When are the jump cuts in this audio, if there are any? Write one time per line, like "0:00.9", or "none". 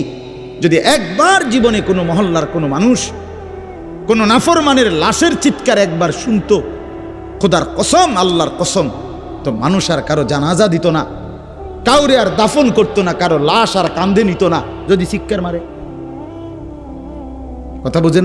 none